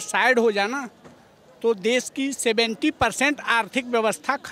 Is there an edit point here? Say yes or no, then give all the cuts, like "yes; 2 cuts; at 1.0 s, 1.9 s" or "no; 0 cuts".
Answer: no; 0 cuts